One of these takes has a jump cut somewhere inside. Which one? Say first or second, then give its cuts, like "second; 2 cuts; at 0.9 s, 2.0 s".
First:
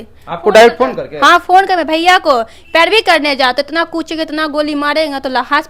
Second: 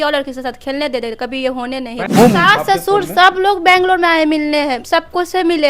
second; 1 cut; at 2.1 s